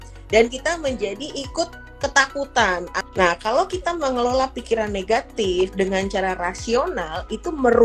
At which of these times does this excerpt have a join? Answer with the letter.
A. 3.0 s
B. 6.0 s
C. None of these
A